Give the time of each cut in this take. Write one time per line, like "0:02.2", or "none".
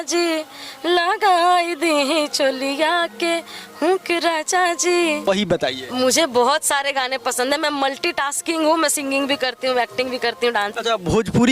0:05.3
0:10.7